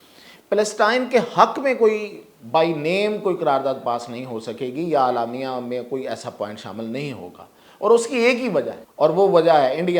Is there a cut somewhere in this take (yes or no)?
yes